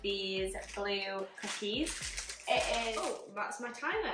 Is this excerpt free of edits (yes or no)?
no